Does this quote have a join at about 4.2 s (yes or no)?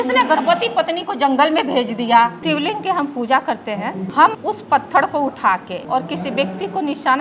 yes